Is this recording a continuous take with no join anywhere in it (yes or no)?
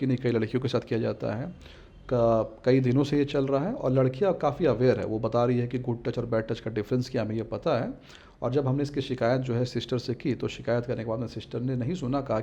yes